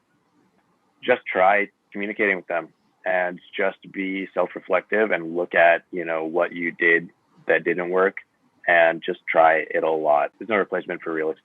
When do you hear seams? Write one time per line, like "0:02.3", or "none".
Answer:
0:10.4